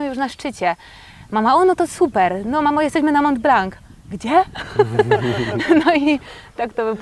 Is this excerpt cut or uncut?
uncut